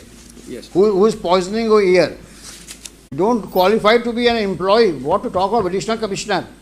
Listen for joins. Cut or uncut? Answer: cut